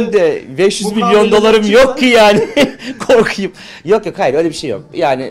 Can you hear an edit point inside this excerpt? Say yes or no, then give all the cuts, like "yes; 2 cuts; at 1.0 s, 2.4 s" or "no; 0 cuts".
no; 0 cuts